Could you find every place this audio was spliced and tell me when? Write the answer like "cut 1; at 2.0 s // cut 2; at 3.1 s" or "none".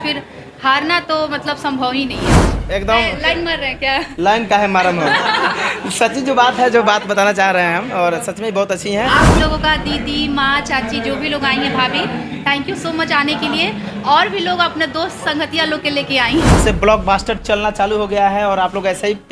cut 1; at 2.5 s // cut 2; at 9.4 s // cut 3; at 16.6 s

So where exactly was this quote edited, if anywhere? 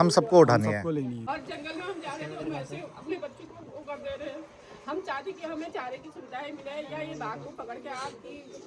cut 1; at 1.3 s

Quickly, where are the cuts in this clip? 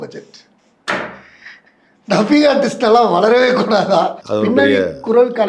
cut 1; at 4.2 s

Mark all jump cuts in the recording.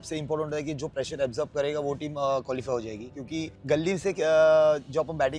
cut 1; at 3.5 s

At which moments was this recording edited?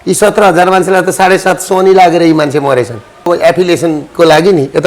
cut 1; at 3.3 s

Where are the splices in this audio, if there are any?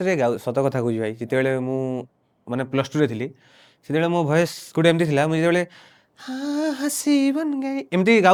none

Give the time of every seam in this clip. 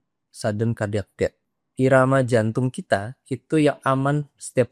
cut 1; at 1.5 s

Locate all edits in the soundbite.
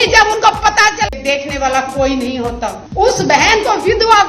cut 1; at 1.1 s

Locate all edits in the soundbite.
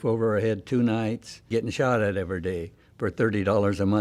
cut 1; at 1.5 s

